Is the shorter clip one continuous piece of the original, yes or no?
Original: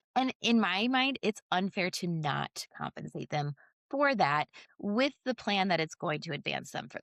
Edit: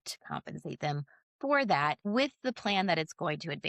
no